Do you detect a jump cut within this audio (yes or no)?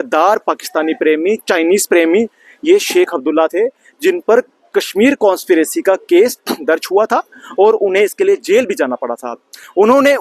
no